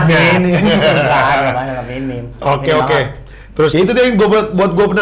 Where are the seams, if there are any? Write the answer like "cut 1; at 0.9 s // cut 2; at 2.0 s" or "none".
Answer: cut 1; at 3.7 s